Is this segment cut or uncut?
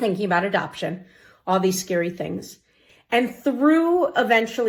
uncut